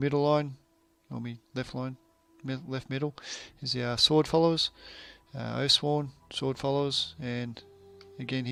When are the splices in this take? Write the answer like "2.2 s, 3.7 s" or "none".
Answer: none